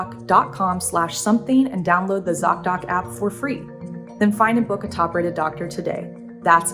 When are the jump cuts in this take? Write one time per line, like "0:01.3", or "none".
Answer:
none